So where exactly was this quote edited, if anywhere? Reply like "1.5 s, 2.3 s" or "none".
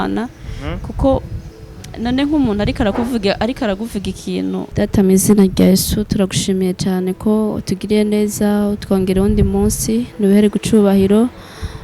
4.7 s